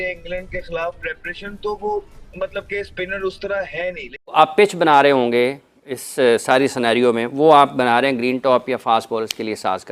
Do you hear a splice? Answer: yes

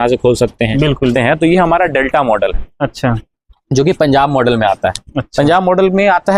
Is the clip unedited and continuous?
no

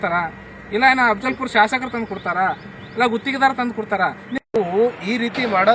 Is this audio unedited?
no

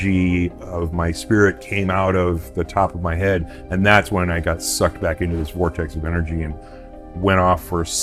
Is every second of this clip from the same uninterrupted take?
yes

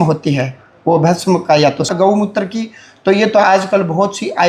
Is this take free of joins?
no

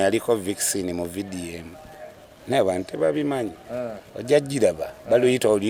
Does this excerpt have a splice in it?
no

